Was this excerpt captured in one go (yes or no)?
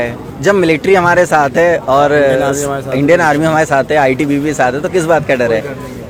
yes